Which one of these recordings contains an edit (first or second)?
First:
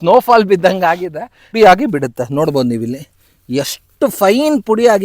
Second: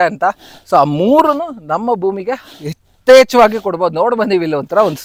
first